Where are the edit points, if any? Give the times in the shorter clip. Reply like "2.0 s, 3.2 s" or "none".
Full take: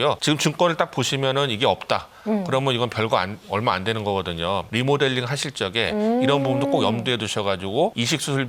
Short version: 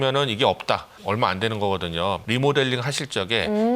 0.9 s